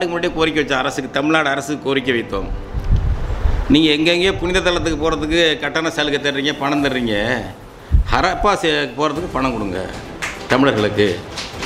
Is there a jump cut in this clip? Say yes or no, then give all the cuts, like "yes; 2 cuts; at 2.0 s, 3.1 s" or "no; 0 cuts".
no; 0 cuts